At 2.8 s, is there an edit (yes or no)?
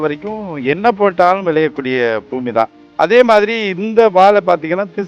yes